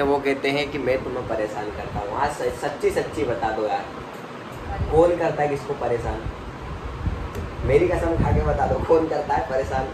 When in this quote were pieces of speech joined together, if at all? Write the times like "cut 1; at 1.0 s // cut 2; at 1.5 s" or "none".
none